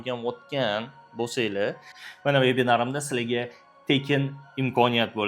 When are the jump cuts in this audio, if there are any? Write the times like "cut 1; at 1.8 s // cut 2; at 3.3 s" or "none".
cut 1; at 1.9 s